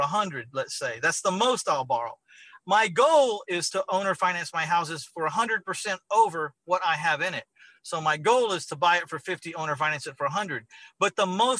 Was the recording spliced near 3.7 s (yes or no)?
yes